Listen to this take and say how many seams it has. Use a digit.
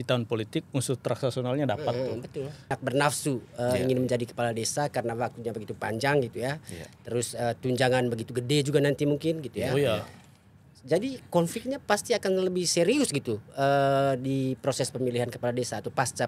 1